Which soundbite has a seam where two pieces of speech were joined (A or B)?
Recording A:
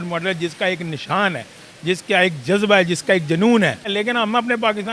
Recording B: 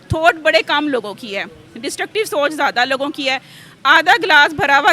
A